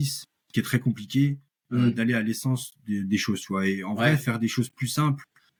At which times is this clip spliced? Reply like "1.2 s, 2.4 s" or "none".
none